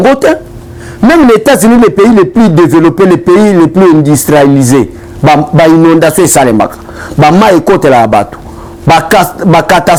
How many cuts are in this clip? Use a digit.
0